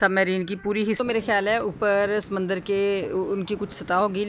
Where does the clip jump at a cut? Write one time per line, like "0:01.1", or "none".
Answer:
0:01.0